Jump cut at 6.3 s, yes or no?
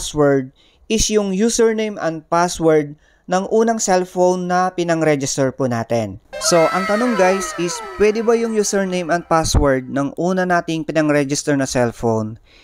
no